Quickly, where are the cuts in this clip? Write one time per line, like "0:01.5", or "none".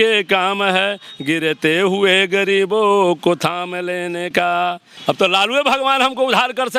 0:04.9